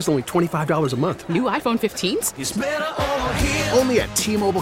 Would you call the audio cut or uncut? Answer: uncut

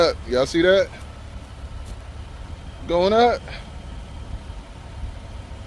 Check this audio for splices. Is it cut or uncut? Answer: uncut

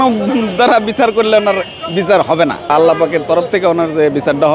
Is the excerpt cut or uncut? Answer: cut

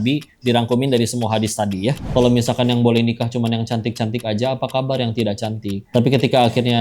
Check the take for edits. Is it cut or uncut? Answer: cut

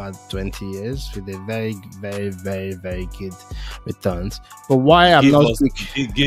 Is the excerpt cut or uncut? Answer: uncut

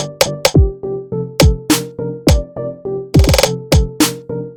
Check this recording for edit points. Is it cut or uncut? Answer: uncut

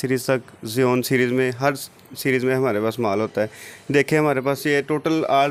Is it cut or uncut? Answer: uncut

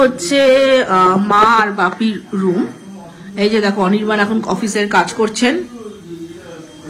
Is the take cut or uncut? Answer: uncut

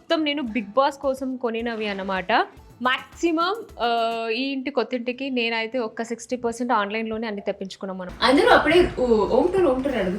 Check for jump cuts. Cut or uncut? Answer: cut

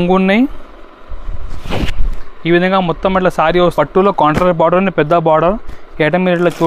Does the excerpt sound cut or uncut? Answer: cut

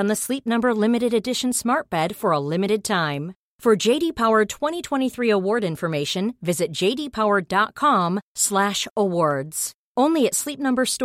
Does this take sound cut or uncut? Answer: uncut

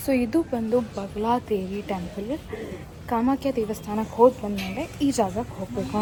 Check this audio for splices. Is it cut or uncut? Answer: uncut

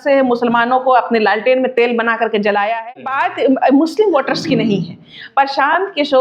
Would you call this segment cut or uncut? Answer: cut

